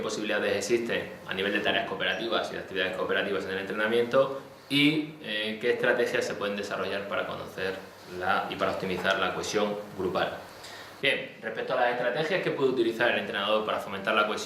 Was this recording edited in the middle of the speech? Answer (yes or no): yes